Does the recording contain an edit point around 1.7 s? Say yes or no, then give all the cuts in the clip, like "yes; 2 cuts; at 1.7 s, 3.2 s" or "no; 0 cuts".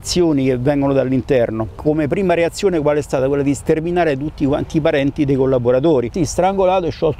yes; 2 cuts; at 1.7 s, 6.1 s